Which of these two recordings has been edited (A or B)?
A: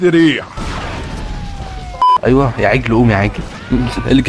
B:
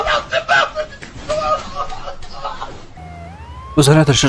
A